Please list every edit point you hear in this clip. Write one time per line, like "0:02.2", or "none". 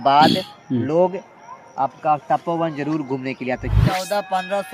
0:03.8